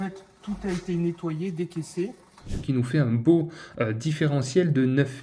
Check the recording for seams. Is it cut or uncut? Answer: cut